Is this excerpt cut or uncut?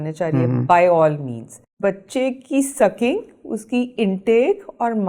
cut